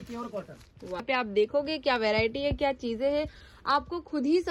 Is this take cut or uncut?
cut